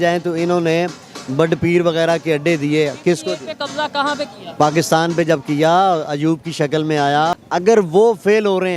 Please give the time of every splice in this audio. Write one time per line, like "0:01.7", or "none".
0:07.4